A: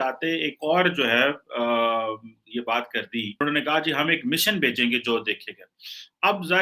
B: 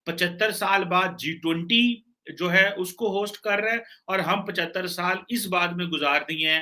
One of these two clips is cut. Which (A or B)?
A